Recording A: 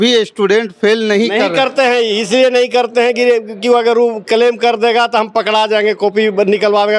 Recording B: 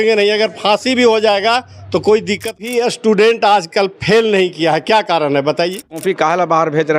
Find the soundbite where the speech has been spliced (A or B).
B